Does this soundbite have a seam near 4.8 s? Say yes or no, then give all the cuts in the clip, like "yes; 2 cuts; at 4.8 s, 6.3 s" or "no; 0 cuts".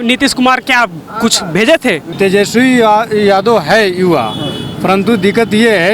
no; 1 cut; at 2.1 s